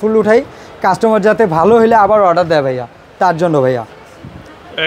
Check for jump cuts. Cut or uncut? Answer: uncut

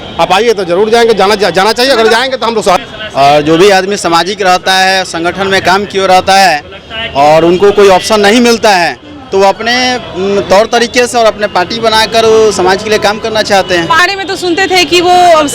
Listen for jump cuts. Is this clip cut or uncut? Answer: cut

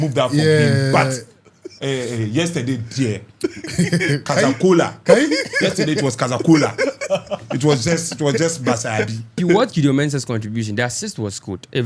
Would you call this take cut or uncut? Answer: cut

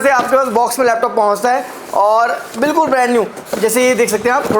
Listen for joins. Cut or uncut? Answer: uncut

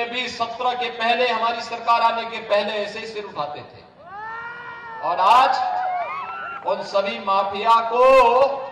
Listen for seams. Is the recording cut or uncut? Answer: uncut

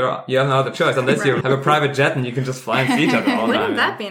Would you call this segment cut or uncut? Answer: cut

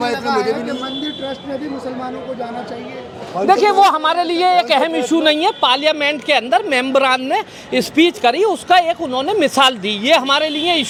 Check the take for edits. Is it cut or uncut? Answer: uncut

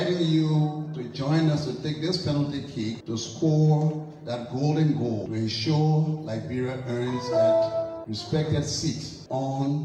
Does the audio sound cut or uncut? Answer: uncut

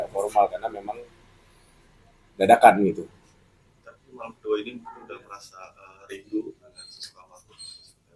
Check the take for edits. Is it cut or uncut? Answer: uncut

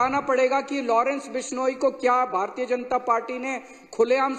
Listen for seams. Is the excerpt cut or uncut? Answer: uncut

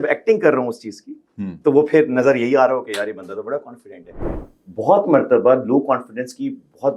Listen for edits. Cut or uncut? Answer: cut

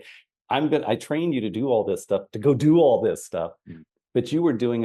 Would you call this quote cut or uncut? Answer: uncut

